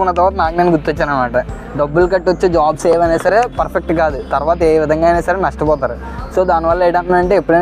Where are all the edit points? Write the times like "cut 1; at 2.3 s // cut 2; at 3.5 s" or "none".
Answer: cut 1; at 1.6 s